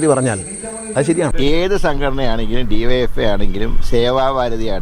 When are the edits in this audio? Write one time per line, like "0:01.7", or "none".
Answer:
0:01.3

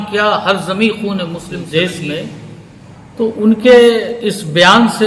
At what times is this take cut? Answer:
0:01.6

